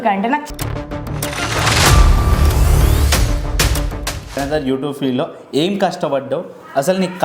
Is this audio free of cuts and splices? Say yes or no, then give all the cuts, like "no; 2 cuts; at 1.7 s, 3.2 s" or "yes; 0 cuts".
no; 1 cut; at 4.4 s